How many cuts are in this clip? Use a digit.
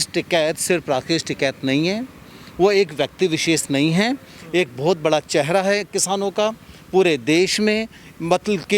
0